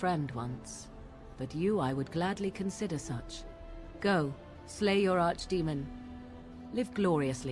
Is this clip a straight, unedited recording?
yes; 0 cuts

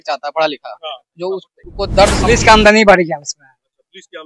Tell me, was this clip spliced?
yes; 1 cut; at 2.2 s

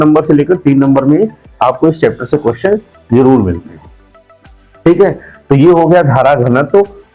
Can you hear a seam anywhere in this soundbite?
no; 0 cuts

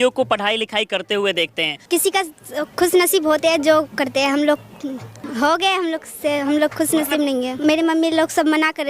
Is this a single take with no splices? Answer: no; 3 cuts; at 1.7 s, 5.1 s, 7.5 s

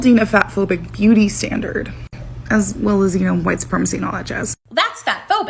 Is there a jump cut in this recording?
yes; 1 cut; at 4.5 s

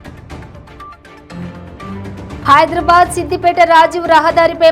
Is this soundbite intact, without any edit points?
no; 1 cut; at 1.1 s

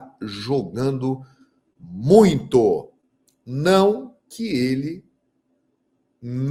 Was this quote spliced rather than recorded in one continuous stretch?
no; 0 cuts

